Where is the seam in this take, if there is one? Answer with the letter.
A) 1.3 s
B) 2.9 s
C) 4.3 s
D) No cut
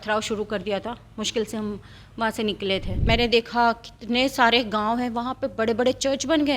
B